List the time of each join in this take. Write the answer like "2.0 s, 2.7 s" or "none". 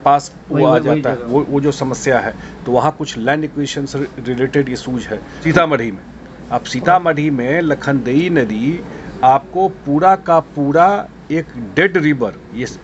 5.3 s

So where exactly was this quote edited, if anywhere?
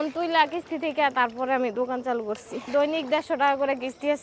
none

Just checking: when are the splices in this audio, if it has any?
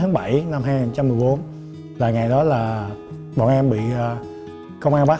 none

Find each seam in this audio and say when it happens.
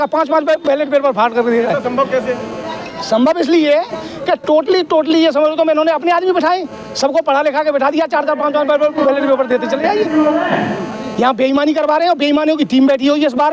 none

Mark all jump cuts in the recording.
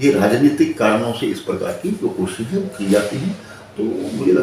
none

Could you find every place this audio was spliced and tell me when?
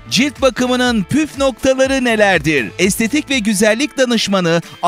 none

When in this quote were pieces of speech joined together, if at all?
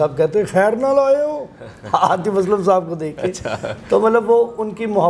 none

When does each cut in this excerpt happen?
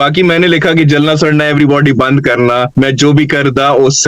2.7 s

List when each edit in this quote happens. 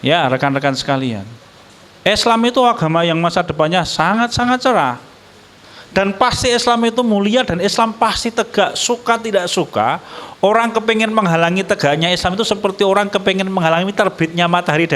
none

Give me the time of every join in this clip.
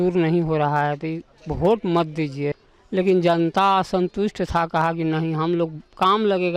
2.7 s

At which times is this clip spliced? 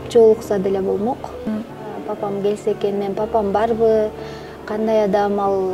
1.5 s

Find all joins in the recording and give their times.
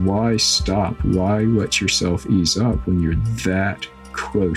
2.8 s

